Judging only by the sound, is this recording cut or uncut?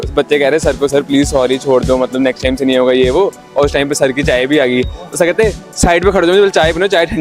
uncut